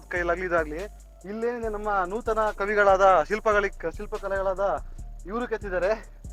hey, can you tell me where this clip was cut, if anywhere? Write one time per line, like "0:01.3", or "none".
none